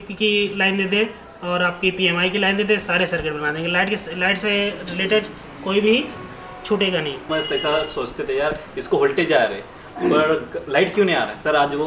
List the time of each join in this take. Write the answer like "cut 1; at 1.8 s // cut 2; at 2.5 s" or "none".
cut 1; at 7.3 s

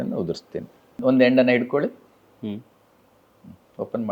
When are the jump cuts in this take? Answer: cut 1; at 1.0 s

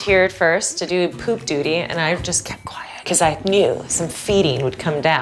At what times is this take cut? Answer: none

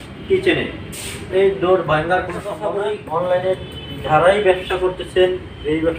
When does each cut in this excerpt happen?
cut 1; at 2.5 s

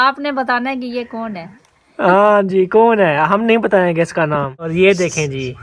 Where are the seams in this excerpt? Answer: cut 1; at 4.6 s

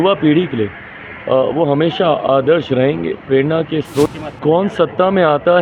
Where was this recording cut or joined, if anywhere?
cut 1; at 4.1 s

